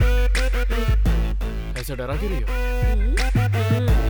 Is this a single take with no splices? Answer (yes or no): yes